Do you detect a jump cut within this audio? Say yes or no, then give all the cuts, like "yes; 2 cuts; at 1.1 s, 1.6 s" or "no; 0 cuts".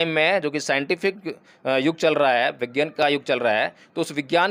no; 0 cuts